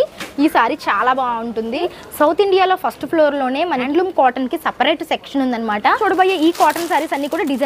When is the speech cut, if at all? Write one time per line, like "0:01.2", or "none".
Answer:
0:01.8
0:03.8
0:05.9